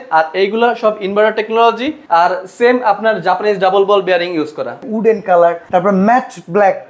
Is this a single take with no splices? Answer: no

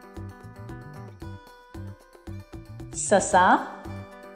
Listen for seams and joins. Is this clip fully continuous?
yes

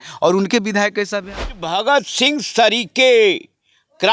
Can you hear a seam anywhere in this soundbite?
yes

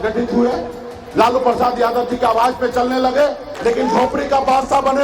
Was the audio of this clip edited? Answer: yes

